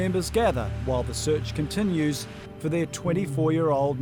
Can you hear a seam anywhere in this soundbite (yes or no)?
no